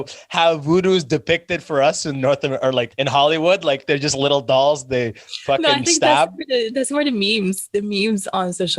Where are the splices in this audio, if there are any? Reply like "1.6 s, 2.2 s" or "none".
2.9 s

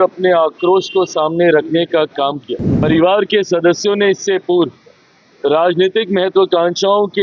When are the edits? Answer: 2.7 s

